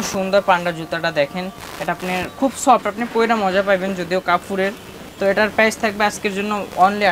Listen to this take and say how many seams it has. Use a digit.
0